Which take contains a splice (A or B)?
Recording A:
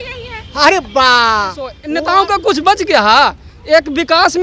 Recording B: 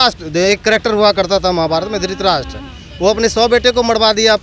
A